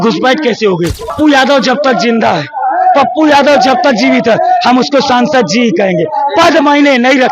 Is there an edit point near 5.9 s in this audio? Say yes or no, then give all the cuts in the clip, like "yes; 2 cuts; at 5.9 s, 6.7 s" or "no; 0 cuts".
no; 1 cut; at 1.1 s